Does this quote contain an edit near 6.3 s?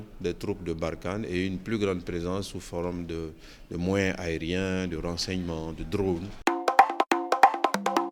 yes; 1 cut; at 6.3 s

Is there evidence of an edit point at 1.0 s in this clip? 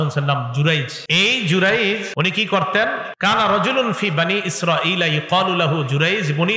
yes; 3 cuts; at 1.0 s, 2.1 s, 3.1 s

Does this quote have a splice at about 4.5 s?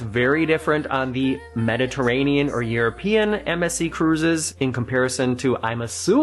yes; 1 cut; at 4.5 s

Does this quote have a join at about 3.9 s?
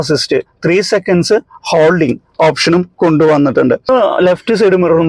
yes; 1 cut; at 3.9 s

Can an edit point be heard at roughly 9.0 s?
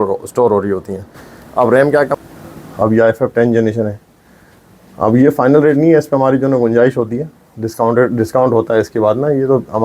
no; 1 cut; at 2.2 s

